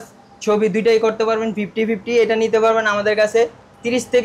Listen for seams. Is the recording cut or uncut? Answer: uncut